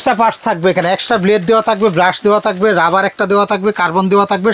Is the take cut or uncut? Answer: uncut